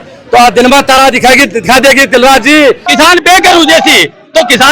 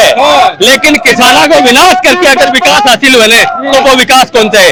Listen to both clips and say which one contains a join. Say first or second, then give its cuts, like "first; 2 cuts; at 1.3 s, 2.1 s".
first; 1 cut; at 2.9 s